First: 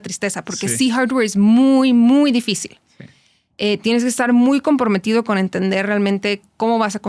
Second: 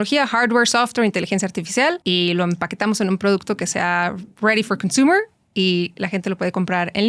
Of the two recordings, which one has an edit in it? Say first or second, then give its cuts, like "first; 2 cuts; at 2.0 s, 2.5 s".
second; 1 cut; at 2.0 s